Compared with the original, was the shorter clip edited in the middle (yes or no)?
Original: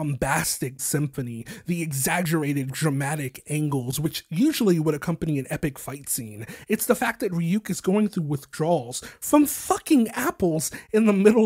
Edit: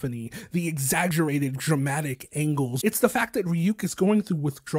yes